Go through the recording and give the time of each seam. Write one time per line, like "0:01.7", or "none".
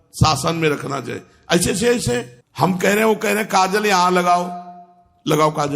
0:02.4